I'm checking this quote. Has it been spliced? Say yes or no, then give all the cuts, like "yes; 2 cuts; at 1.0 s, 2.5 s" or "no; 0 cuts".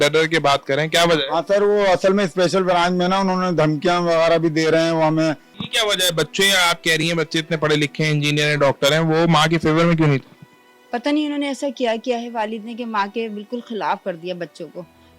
yes; 1 cut; at 5.5 s